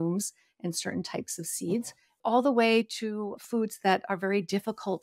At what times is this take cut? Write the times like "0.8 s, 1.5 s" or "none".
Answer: 2.1 s, 3.4 s